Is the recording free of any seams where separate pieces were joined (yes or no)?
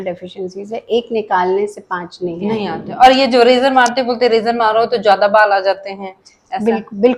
yes